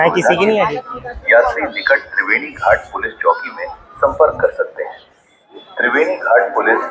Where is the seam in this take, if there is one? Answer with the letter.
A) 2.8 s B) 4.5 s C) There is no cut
C